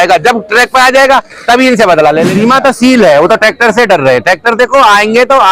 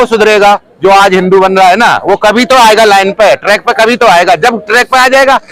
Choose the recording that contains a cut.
first; 1 cut; at 2.3 s

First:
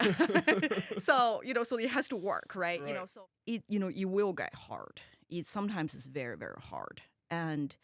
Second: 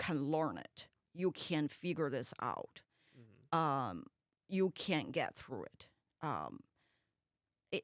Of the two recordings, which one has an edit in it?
first; 1 cut; at 3.1 s

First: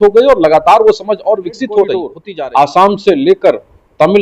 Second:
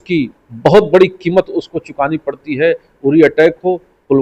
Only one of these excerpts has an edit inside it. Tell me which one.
first; 1 cut; at 2.2 s

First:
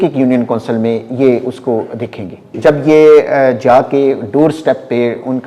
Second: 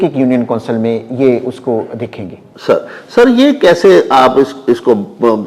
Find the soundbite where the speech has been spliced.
first; 1 cut; at 2.6 s

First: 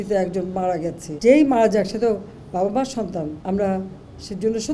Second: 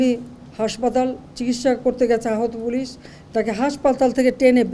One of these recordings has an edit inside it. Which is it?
first; 2 cuts; at 1.0 s, 3.4 s

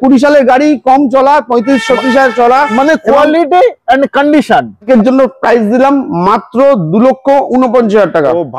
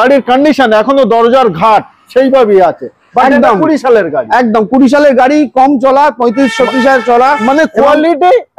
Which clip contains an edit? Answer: first; 1 cut; at 4.8 s

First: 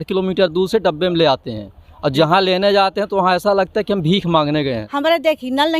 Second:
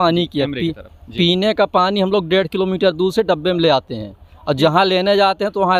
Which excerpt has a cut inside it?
first; 1 cut; at 4.8 s

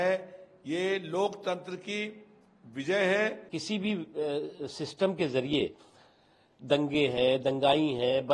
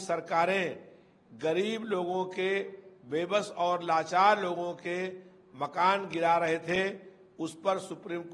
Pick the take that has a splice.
first; 1 cut; at 3.5 s

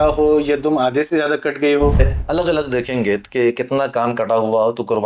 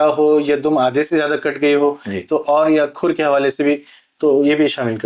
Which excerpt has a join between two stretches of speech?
first; 1 cut; at 2.0 s

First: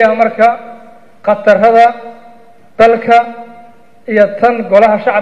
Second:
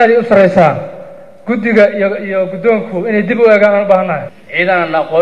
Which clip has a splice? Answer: second; 1 cut; at 4.2 s

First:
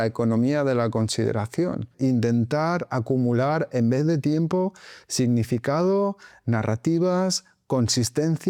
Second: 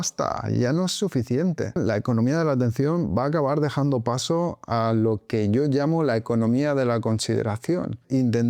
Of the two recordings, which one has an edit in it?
second; 1 cut; at 1.8 s

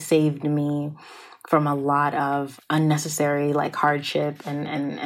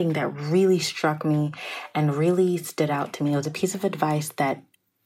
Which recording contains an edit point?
first; 1 cut; at 2.6 s

